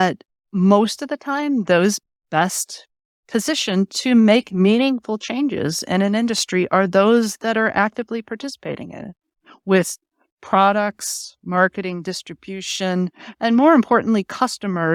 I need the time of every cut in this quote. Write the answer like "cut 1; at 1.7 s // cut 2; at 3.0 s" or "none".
none